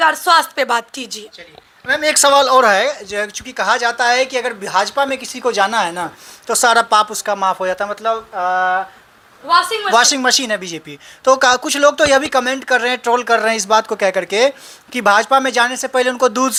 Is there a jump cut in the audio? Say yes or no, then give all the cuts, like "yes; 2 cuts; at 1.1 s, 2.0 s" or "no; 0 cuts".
no; 0 cuts